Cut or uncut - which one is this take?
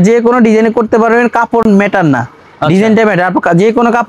uncut